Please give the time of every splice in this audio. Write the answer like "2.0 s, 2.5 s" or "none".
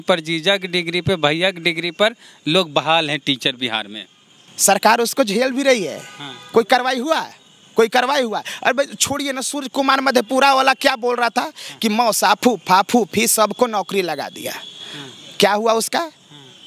none